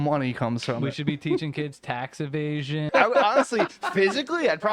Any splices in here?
yes; 1 cut; at 2.9 s

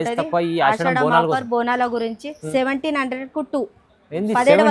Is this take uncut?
no; 1 cut; at 2.3 s

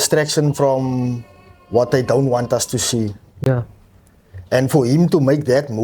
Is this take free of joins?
no; 1 cut; at 3.5 s

